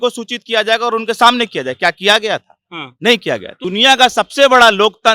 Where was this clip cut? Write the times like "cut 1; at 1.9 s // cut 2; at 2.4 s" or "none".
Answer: cut 1; at 3.6 s